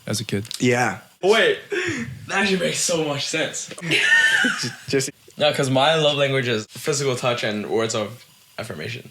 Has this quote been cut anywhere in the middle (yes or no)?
yes